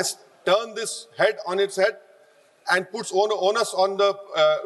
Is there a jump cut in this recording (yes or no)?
no